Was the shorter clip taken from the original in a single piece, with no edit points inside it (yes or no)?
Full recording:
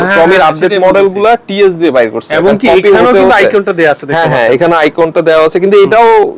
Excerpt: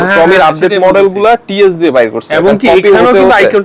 yes